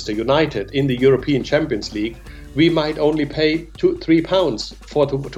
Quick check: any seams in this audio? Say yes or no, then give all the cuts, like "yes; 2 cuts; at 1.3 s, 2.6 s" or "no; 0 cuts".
no; 0 cuts